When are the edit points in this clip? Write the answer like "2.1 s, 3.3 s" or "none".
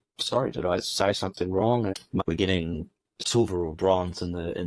2.1 s, 3.2 s